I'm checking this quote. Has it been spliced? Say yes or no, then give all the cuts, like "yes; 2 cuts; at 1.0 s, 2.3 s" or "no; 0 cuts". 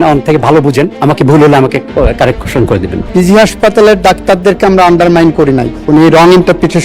yes; 3 cuts; at 0.9 s, 2.9 s, 5.7 s